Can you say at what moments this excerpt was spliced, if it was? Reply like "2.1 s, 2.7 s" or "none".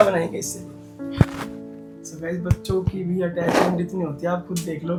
none

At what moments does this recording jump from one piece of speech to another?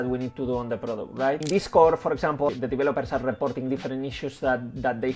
1.4 s, 2.5 s

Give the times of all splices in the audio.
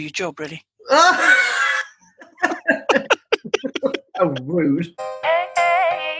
5.0 s

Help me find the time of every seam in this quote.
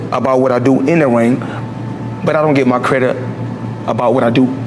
none

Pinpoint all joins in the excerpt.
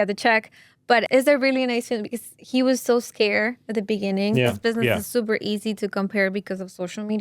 1.1 s, 4.6 s

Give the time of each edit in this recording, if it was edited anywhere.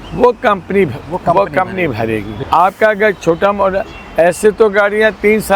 none

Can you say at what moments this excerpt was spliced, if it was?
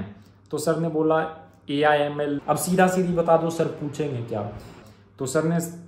2.4 s, 4.8 s

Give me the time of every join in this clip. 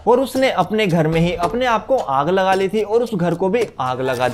none

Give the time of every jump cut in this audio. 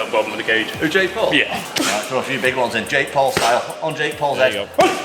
1.6 s

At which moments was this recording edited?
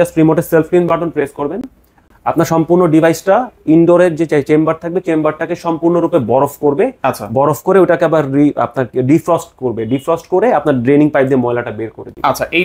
none

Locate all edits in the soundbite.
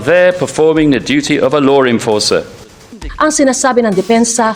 3.0 s

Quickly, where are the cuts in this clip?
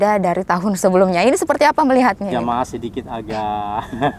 2.3 s

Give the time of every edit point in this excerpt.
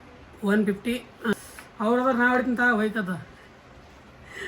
1.3 s

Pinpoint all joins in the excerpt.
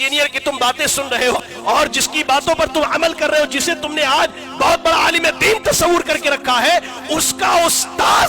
1.3 s

